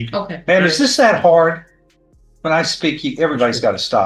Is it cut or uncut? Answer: uncut